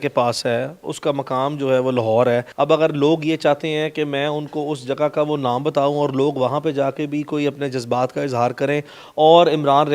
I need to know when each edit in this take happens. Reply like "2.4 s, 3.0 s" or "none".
none